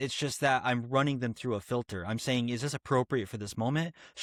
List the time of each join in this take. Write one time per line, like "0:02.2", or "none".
none

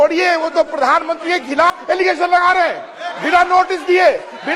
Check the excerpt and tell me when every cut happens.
0:01.7

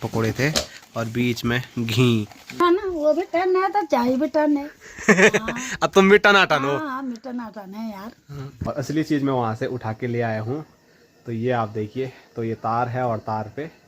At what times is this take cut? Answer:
0:02.4
0:08.7

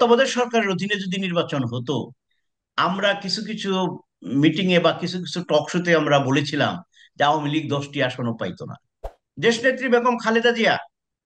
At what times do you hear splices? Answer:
0:09.2

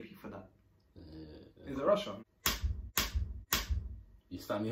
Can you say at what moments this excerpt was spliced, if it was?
0:02.2

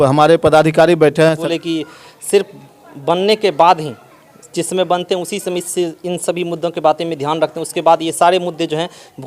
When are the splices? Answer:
0:01.4

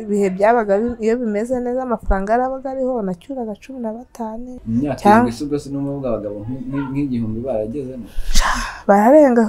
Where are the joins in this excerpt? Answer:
0:04.5

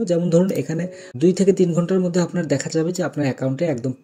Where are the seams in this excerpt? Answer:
0:01.1

